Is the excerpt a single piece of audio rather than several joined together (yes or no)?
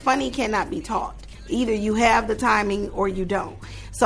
no